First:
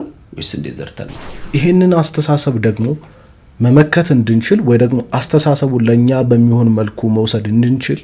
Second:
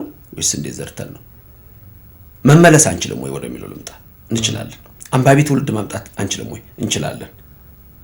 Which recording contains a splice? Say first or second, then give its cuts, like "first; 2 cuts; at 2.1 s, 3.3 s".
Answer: first; 1 cut; at 1.5 s